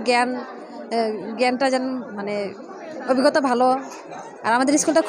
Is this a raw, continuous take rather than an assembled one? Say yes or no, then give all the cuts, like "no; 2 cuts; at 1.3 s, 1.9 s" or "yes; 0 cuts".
yes; 0 cuts